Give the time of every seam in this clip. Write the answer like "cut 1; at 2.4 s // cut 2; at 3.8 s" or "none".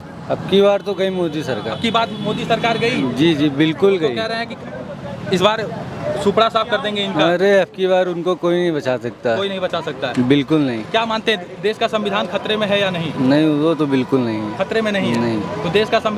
none